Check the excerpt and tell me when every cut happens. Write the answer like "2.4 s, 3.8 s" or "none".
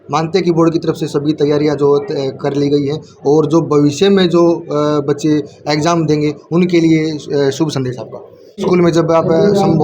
8.5 s